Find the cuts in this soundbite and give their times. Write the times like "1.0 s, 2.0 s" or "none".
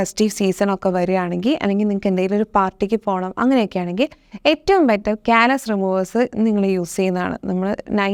none